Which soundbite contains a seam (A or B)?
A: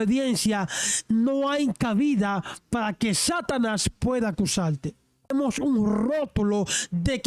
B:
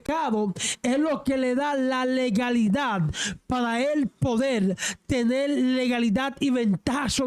A